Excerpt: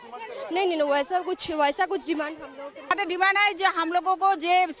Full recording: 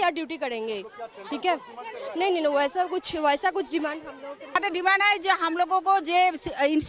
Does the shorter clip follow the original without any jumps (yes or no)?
yes